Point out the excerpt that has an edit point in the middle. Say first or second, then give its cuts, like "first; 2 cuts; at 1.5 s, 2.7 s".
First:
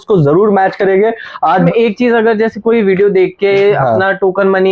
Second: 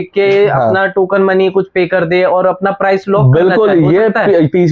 first; 1 cut; at 1.5 s